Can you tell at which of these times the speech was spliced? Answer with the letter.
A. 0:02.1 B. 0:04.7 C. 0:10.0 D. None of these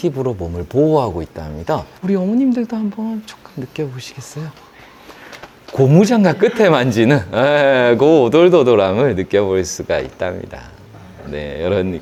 D